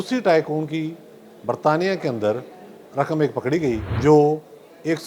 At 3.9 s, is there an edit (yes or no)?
yes